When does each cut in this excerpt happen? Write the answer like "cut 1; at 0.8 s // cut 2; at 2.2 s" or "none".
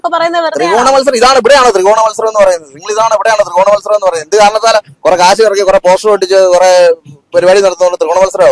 none